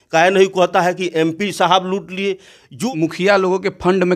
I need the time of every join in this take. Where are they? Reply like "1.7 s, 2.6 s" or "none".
2.8 s